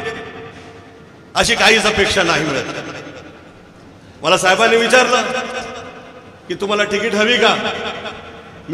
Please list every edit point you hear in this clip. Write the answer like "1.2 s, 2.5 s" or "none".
none